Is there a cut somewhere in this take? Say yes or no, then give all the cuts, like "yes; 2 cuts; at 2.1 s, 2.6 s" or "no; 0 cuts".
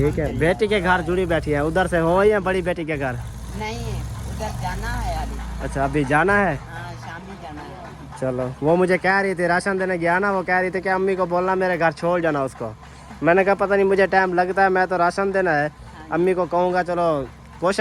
no; 0 cuts